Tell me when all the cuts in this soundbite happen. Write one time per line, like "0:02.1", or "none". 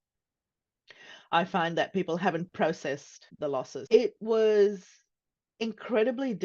0:03.8